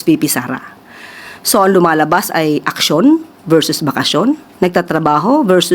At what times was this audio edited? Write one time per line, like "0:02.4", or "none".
0:04.5